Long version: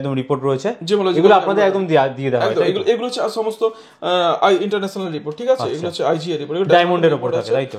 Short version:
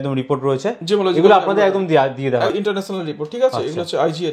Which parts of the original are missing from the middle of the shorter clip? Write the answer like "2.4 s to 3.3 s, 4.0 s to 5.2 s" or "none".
2.5 s to 4.6 s